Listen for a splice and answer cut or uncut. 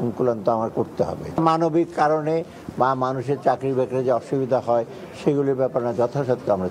uncut